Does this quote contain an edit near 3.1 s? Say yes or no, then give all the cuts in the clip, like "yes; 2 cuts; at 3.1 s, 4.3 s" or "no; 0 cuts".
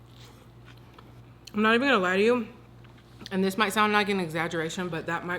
no; 1 cut; at 1.2 s